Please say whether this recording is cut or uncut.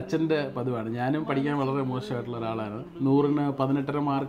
uncut